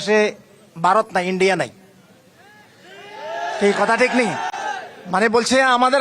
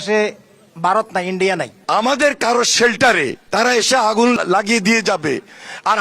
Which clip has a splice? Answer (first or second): second